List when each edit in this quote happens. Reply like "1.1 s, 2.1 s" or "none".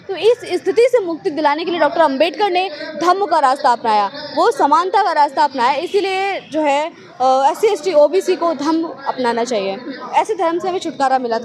10.0 s